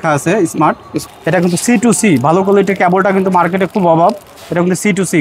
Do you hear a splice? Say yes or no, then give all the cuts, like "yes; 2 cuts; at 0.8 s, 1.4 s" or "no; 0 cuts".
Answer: yes; 1 cut; at 1.0 s